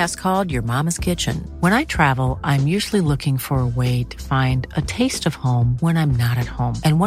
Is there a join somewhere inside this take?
no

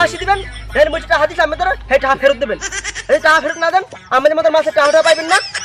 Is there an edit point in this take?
no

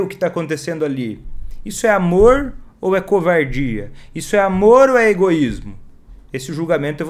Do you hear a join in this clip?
no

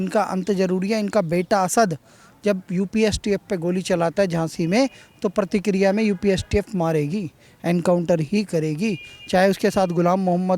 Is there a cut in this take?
no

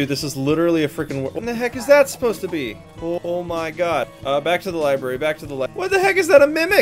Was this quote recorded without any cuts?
no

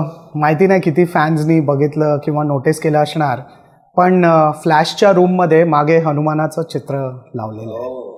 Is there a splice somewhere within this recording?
no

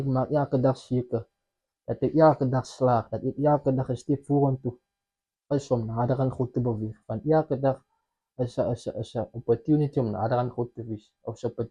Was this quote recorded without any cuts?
yes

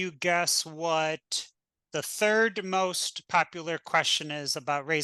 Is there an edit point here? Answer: no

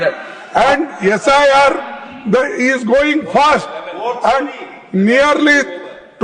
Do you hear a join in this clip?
no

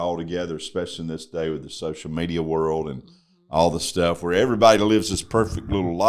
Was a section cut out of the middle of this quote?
no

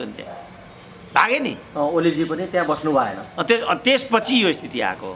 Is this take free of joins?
yes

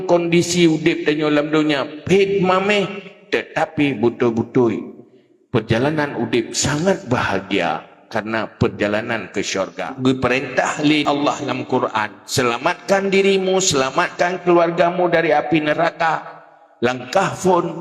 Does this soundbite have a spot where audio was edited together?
yes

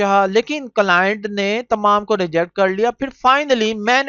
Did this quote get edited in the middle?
no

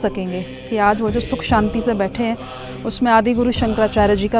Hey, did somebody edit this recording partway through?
no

